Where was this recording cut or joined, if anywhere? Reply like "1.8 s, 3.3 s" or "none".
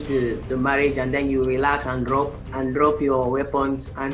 none